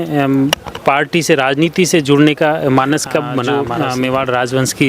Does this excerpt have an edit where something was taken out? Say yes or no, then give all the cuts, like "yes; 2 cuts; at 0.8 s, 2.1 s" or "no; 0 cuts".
yes; 1 cut; at 3.5 s